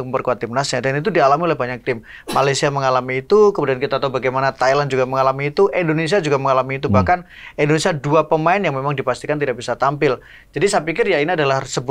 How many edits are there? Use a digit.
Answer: 0